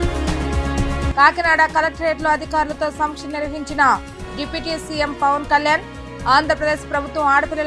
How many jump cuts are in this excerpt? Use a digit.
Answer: 0